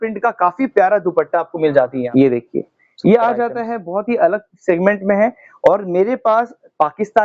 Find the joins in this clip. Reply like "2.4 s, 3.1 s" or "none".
2.0 s

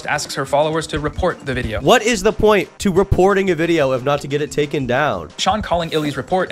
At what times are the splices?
1.7 s, 5.3 s

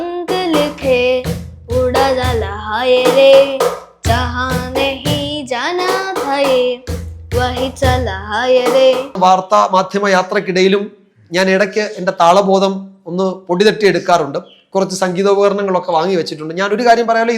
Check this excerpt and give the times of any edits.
9.1 s

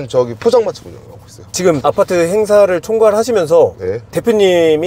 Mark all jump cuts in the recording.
none

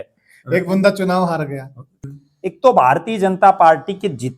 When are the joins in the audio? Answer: 2.0 s

